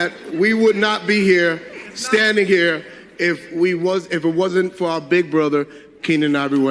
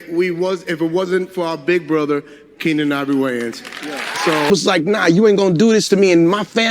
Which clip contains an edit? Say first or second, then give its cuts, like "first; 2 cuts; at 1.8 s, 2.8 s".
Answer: second; 1 cut; at 4.5 s